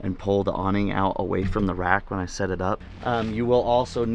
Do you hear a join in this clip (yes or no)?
yes